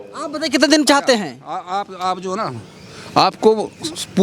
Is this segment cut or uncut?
uncut